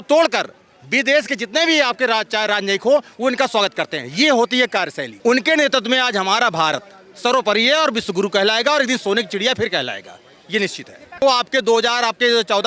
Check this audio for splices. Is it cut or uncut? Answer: cut